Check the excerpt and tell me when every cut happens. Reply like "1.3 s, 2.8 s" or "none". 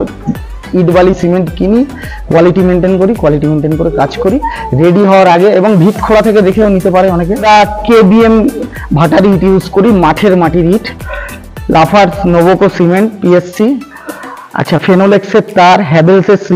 7.4 s